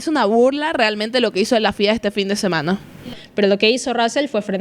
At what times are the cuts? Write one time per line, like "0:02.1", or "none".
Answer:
0:03.1